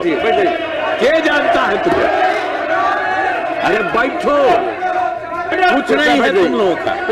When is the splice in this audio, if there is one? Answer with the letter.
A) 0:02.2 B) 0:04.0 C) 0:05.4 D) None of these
C